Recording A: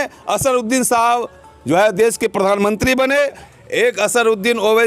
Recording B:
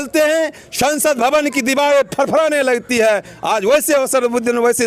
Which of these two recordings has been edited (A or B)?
A